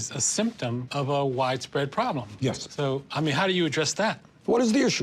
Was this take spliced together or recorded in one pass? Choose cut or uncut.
uncut